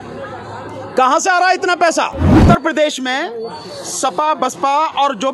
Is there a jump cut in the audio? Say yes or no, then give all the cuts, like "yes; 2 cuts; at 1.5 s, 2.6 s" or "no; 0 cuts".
yes; 1 cut; at 2.4 s